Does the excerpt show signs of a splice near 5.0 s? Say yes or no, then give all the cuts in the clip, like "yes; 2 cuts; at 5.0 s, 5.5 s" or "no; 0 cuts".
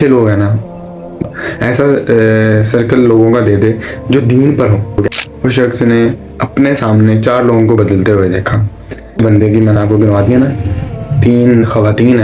yes; 3 cuts; at 1.2 s, 5.0 s, 9.2 s